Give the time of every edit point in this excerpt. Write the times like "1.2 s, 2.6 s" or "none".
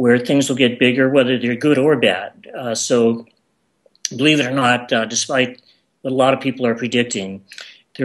1.8 s